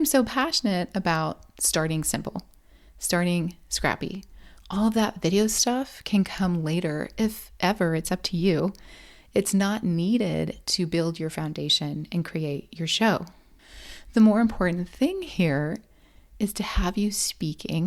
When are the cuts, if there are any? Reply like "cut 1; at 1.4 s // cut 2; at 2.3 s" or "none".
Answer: none

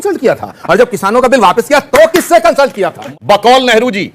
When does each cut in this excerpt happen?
cut 1; at 3.1 s

